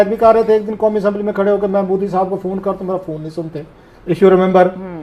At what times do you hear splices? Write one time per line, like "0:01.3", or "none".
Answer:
none